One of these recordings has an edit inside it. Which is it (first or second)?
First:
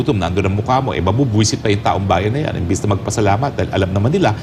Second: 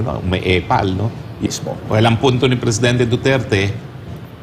second